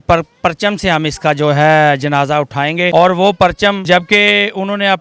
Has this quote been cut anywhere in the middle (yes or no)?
yes